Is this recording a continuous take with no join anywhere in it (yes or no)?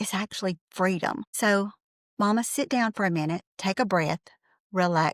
yes